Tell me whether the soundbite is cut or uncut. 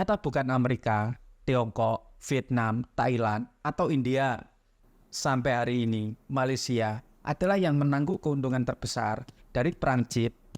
uncut